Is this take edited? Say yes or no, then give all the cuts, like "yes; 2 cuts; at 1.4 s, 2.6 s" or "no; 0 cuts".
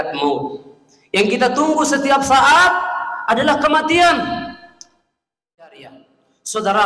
yes; 1 cut; at 5.6 s